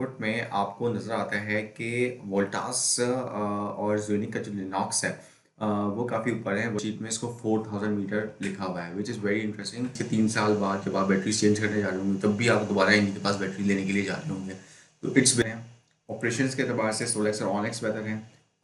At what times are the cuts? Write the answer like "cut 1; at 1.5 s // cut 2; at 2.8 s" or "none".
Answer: cut 1; at 6.8 s // cut 2; at 10.0 s // cut 3; at 15.4 s